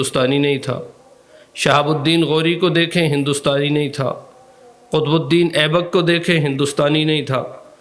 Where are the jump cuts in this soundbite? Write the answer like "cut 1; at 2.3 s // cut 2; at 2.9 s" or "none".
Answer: none